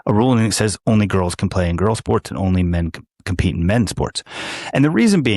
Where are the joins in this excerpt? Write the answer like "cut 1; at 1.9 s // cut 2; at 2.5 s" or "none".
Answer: none